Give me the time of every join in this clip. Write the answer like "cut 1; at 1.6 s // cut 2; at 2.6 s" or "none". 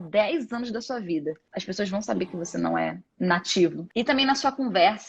cut 1; at 1.5 s // cut 2; at 3.0 s // cut 3; at 3.8 s